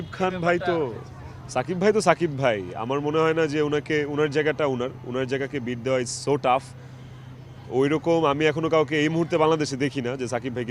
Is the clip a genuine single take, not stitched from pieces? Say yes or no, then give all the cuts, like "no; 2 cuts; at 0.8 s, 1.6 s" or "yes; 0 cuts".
yes; 0 cuts